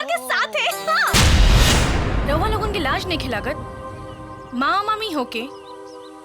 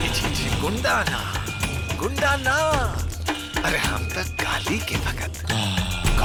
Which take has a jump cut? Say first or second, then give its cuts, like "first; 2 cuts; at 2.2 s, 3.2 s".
first; 1 cut; at 1.1 s